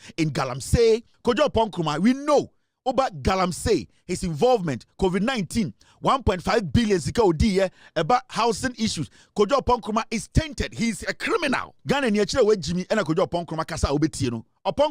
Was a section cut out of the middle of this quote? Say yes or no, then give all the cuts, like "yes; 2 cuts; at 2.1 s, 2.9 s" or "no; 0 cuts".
yes; 2 cuts; at 1.1 s, 11.7 s